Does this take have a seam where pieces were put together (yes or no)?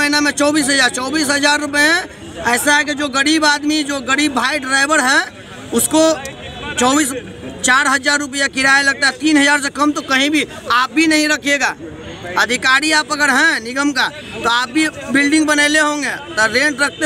no